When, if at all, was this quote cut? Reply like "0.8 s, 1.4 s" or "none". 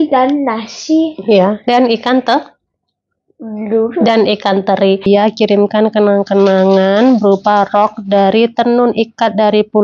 5.1 s